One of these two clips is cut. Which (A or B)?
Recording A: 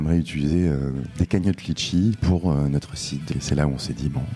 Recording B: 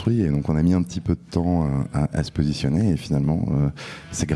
A